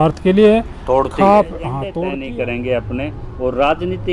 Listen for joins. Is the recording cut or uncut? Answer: cut